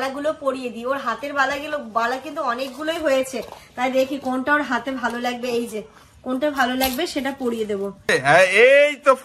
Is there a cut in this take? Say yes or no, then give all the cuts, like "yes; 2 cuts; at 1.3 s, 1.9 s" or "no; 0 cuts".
yes; 1 cut; at 8.1 s